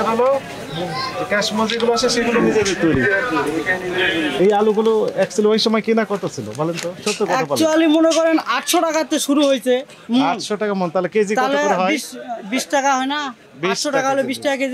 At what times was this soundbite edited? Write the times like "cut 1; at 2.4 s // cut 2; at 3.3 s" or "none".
cut 1; at 4.3 s